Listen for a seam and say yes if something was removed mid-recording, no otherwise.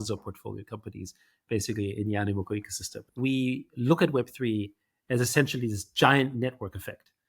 yes